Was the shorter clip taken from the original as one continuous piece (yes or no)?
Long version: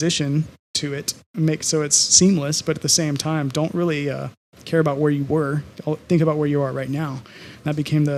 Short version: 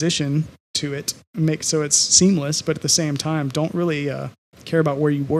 yes